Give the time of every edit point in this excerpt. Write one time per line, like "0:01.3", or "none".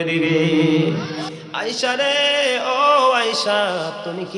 0:01.3